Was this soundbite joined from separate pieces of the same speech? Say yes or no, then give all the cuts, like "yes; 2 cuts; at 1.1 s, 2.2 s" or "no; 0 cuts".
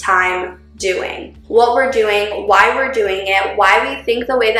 yes; 1 cut; at 1.3 s